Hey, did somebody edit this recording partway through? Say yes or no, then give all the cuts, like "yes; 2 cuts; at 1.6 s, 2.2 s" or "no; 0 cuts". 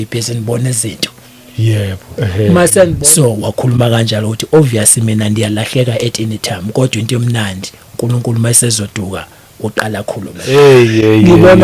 yes; 2 cuts; at 2.9 s, 10.5 s